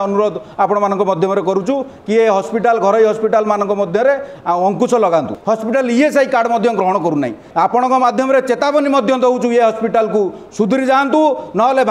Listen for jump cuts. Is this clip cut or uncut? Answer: cut